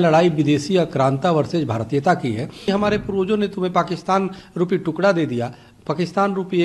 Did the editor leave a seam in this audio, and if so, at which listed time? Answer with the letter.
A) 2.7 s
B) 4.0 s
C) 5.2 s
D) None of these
A